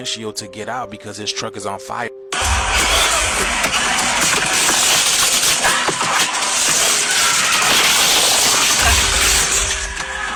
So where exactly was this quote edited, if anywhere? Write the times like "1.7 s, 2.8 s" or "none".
none